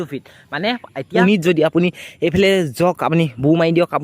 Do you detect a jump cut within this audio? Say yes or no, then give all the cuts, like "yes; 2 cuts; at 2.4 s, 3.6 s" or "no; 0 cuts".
yes; 1 cut; at 1.0 s